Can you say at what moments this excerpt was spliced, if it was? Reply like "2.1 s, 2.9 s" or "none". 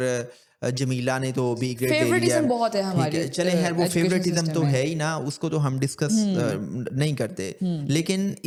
none